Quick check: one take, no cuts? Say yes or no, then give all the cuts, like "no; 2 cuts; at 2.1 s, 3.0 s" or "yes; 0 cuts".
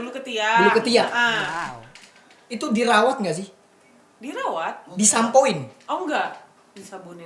yes; 0 cuts